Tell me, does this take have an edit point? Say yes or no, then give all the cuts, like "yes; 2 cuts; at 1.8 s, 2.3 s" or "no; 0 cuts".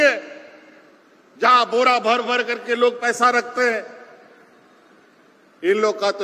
no; 0 cuts